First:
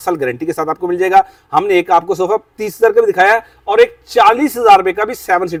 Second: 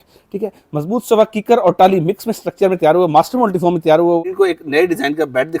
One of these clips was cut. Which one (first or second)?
second